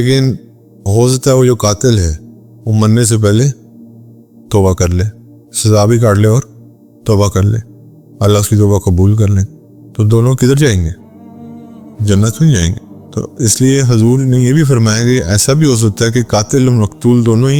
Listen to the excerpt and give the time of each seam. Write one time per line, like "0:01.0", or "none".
none